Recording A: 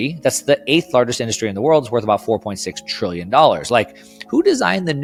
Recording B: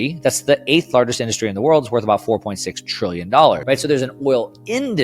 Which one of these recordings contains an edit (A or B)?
B